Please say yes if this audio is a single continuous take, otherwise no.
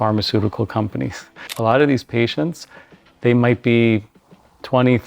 no